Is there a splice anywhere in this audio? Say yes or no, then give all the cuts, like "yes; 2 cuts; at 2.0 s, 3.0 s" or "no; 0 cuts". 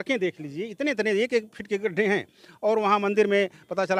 no; 0 cuts